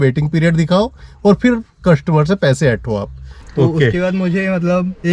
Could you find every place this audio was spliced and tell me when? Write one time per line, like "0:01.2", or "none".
0:03.4